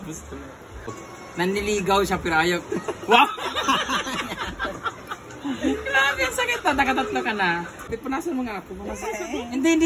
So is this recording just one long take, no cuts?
no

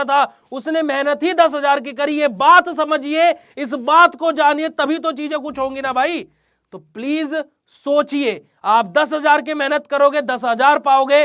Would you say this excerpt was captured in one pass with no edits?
yes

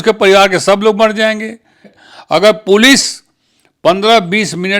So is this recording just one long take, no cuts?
no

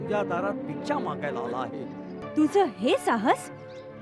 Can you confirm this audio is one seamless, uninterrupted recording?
no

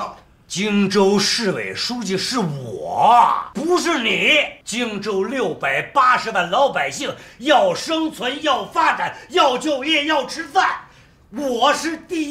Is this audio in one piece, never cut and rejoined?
no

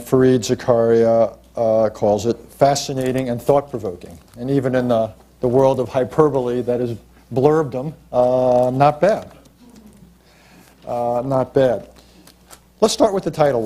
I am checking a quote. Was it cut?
yes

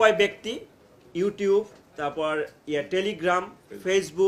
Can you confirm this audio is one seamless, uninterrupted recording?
yes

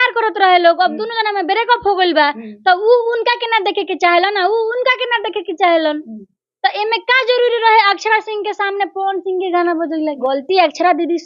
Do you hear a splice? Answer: yes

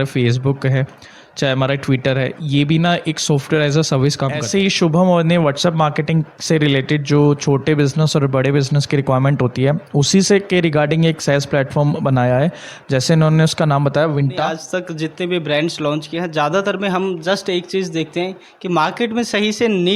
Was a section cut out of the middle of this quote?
yes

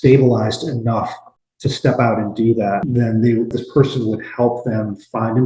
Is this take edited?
no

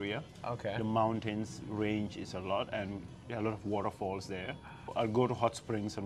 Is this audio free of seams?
no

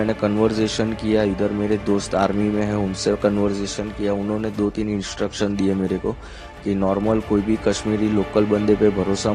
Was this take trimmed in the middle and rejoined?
no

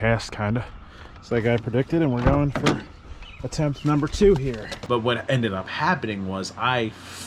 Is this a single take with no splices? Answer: no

